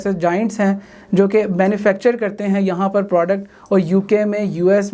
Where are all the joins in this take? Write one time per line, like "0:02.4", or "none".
none